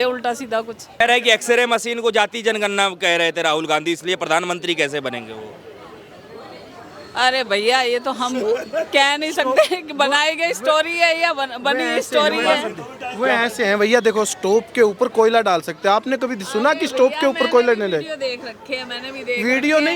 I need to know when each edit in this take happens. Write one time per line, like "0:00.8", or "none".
none